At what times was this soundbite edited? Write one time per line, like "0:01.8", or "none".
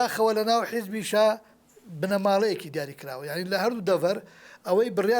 none

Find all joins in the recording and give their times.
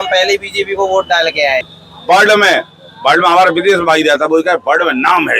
0:01.7

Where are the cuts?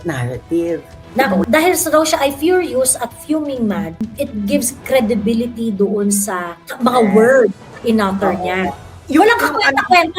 0:01.4

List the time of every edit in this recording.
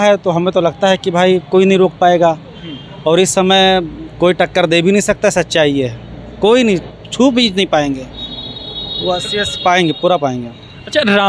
none

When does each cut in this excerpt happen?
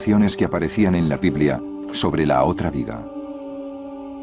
0:01.2

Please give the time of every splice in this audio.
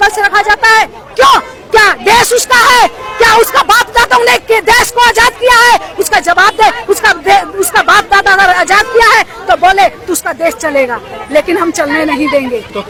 none

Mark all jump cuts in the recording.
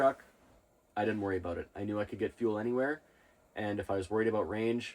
none

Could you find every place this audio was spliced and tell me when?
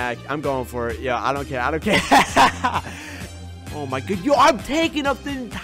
0:03.3

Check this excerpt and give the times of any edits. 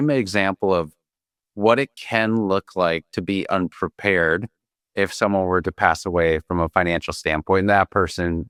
none

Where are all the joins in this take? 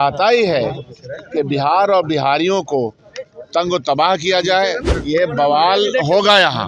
0:04.9

